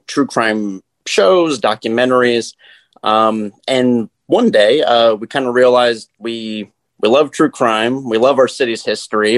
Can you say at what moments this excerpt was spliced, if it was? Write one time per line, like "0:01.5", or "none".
none